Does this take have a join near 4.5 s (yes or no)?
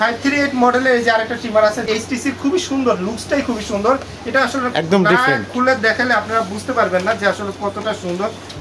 no